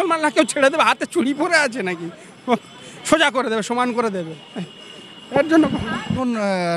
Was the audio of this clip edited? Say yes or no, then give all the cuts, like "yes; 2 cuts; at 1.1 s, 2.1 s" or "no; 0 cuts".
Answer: no; 0 cuts